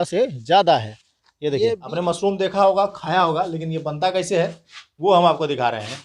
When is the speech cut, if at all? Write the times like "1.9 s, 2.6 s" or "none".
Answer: 1.9 s